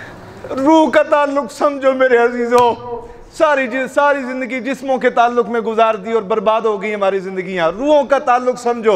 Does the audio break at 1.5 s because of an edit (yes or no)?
no